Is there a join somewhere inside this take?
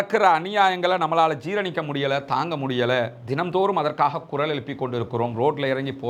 no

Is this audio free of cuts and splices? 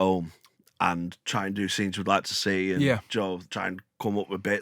no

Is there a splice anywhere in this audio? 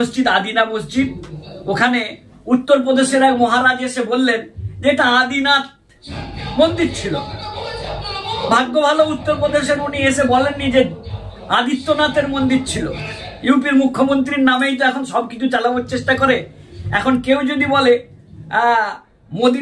no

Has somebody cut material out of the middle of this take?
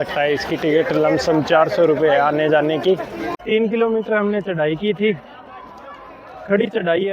yes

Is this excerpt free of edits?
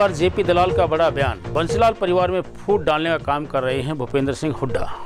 yes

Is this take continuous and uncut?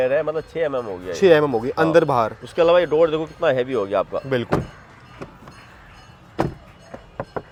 yes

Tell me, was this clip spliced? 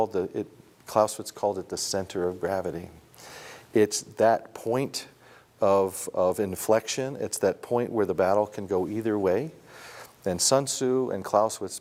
no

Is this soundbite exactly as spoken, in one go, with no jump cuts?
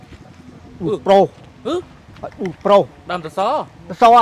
yes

